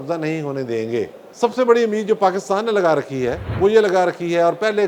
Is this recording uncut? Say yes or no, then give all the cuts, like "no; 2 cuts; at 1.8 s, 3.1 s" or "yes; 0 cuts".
no; 2 cuts; at 1.2 s, 3.4 s